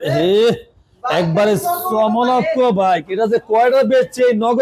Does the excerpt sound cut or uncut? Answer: uncut